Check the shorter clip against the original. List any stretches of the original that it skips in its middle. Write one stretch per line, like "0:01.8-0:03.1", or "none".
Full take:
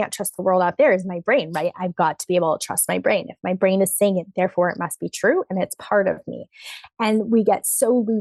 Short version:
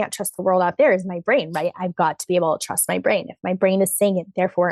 none

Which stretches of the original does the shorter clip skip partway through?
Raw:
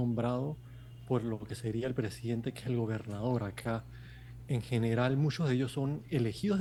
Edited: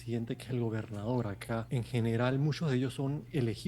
0:03.8-0:04.4

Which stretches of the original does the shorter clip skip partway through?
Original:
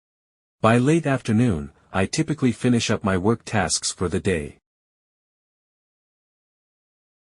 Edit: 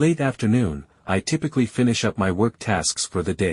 none

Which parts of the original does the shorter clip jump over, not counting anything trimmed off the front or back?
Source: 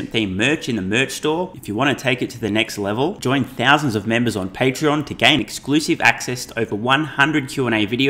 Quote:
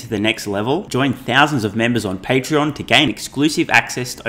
none

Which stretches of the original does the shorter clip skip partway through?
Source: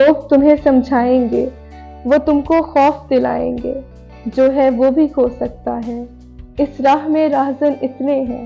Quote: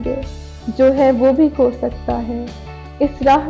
none

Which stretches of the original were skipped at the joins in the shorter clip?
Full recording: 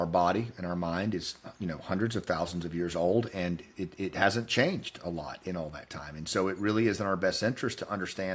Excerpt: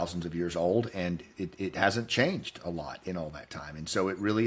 none

